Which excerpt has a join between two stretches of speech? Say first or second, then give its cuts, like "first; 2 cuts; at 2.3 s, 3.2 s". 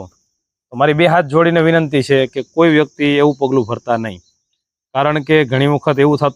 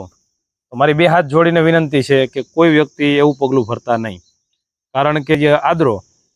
second; 1 cut; at 5.3 s